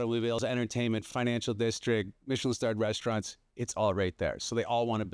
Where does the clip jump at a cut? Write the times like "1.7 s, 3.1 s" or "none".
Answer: none

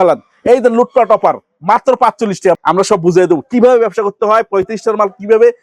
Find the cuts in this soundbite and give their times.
2.6 s

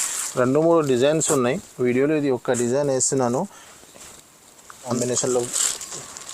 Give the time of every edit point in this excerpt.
4.9 s

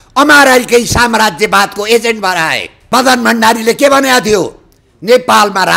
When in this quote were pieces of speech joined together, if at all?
2.7 s

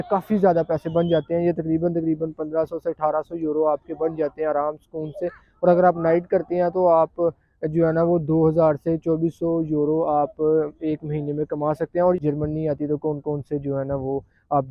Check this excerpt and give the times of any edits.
12.2 s

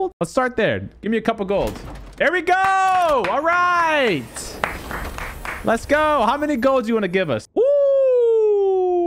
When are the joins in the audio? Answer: none

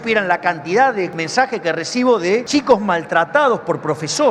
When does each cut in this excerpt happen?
1.2 s, 2.5 s

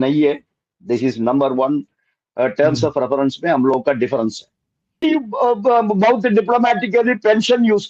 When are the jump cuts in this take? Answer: 5.0 s

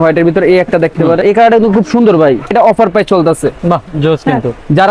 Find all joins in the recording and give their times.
1.2 s, 2.5 s

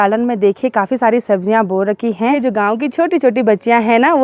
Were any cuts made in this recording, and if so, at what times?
2.4 s

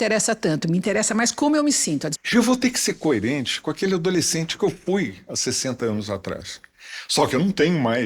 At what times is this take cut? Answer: 2.1 s

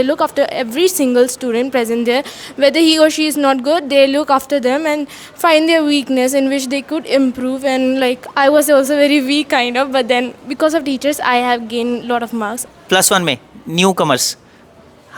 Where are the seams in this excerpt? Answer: 12.6 s

